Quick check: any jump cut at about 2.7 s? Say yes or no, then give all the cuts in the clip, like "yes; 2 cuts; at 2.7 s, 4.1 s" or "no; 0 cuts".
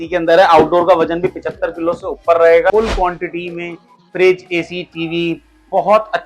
yes; 1 cut; at 2.7 s